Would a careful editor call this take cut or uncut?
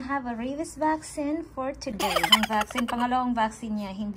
cut